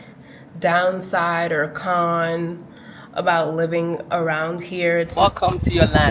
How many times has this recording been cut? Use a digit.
1